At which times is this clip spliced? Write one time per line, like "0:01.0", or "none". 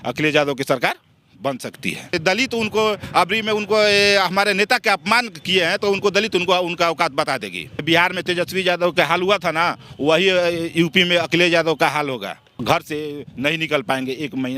0:02.1
0:07.8
0:12.6